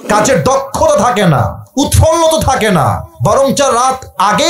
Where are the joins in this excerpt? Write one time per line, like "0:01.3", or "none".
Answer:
0:01.6
0:03.1